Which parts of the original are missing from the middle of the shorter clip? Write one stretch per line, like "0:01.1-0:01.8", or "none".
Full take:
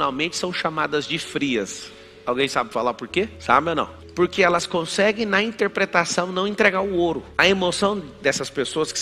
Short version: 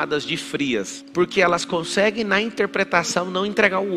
0:01.8-0:04.0